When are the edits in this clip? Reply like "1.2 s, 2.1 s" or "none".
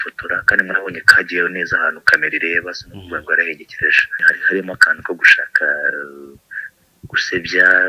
4.3 s